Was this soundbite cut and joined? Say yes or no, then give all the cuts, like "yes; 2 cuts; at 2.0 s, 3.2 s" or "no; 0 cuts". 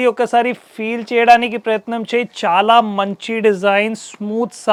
no; 0 cuts